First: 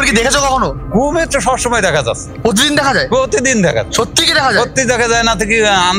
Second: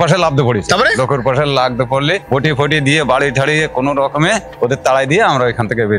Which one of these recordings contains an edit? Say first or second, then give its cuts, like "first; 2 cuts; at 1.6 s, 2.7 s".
second; 2 cuts; at 2.2 s, 4.5 s